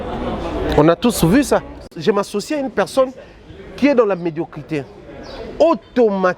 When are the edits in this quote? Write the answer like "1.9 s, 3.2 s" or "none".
1.9 s